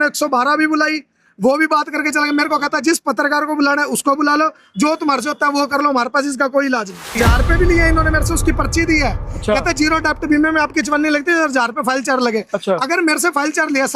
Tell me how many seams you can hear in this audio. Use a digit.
1